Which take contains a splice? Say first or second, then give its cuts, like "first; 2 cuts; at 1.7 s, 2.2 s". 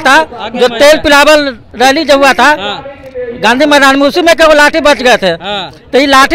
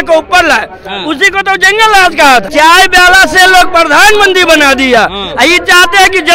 second; 1 cut; at 2.5 s